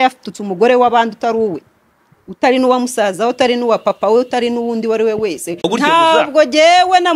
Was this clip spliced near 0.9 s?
no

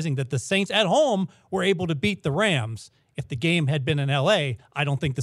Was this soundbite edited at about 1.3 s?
no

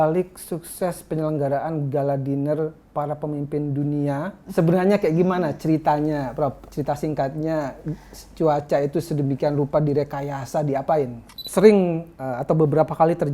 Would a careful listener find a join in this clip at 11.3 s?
yes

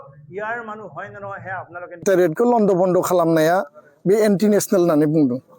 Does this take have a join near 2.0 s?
yes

